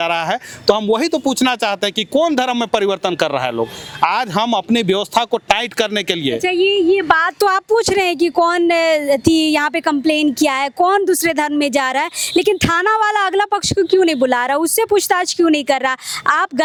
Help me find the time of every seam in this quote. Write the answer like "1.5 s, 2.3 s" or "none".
none